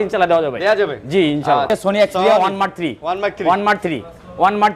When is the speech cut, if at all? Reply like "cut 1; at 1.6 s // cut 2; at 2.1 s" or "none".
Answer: cut 1; at 1.7 s